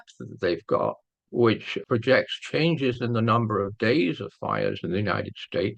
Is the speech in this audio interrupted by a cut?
yes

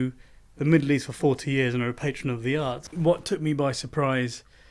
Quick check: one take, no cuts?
no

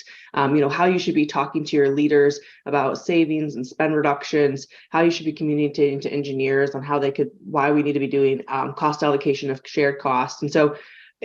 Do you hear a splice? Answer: no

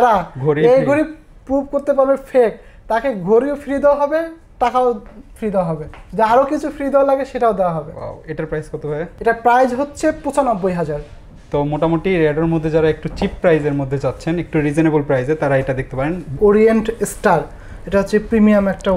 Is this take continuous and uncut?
yes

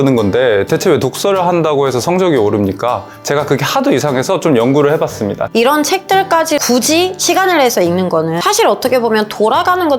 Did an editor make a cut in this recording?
yes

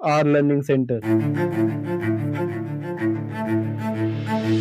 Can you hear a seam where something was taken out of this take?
yes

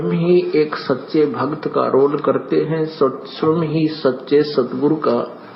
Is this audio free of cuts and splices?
no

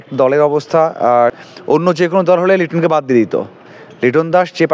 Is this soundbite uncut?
no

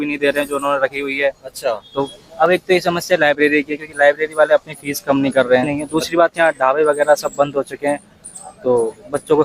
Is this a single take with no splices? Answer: no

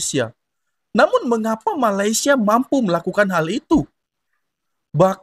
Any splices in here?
no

